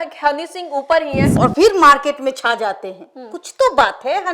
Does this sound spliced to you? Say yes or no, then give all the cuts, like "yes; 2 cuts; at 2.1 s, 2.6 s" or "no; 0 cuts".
yes; 1 cut; at 1.2 s